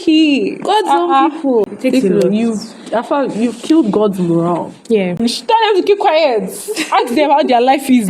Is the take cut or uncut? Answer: cut